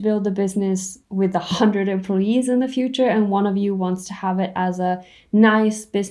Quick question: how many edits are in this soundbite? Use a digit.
1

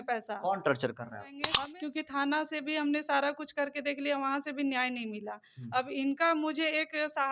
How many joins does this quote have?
1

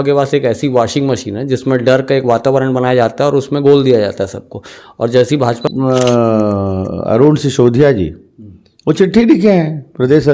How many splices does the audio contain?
1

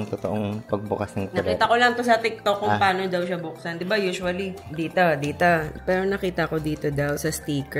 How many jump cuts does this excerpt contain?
2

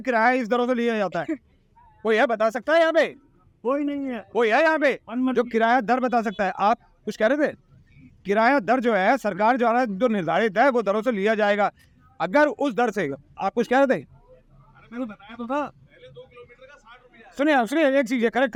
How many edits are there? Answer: 0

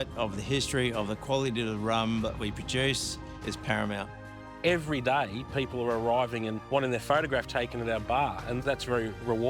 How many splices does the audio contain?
2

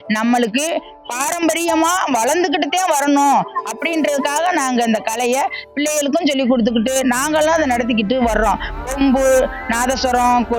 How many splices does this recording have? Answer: 0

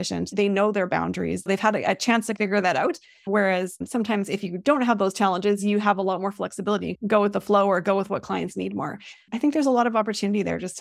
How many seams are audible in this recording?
1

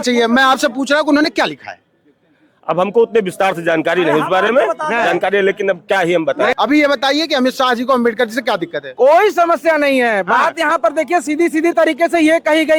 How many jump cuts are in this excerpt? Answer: 1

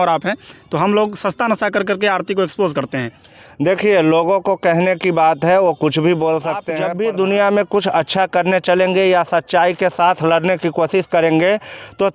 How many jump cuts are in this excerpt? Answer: 1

